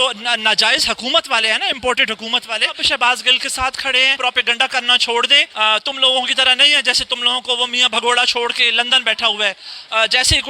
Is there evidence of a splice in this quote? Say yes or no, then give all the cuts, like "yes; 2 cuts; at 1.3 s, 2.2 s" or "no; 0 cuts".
yes; 4 cuts; at 2.8 s, 4.2 s, 5.5 s, 8.6 s